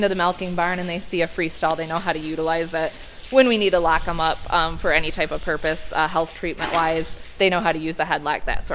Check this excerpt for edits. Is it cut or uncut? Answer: uncut